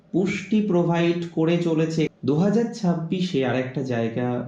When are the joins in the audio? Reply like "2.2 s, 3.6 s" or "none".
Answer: 2.2 s